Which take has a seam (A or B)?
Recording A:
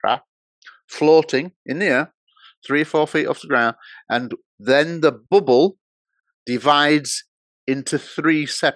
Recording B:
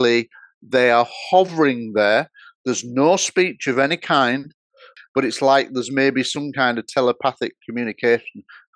B